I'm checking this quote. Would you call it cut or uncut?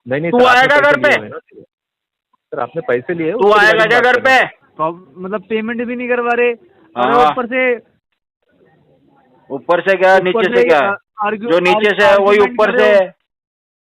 cut